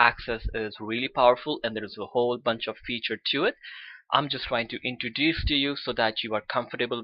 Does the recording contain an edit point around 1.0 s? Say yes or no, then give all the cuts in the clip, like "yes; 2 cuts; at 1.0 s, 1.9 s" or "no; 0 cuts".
yes; 1 cut; at 1.0 s